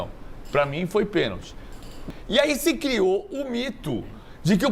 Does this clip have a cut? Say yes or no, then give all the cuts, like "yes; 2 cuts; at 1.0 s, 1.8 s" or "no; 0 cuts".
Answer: yes; 1 cut; at 1.9 s